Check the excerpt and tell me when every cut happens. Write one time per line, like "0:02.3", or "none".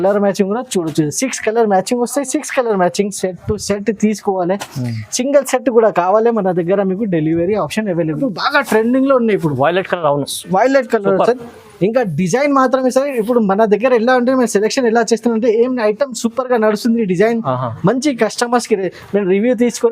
0:08.2